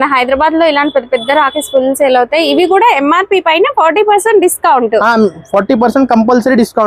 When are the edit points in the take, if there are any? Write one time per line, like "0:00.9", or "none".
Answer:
none